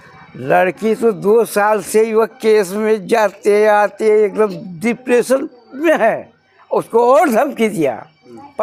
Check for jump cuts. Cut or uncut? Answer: uncut